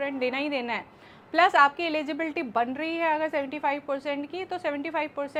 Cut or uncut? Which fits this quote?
uncut